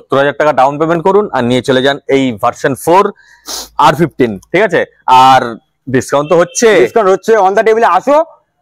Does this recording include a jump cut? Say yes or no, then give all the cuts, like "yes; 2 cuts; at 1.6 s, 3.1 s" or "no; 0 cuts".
no; 0 cuts